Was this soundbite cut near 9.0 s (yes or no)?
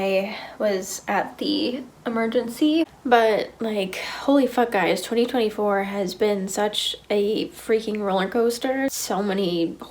yes